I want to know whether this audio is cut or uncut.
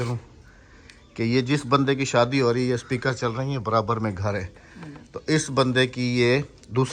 uncut